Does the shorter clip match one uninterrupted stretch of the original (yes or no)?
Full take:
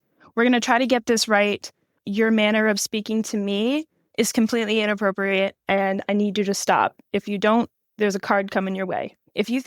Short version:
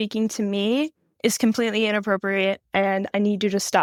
yes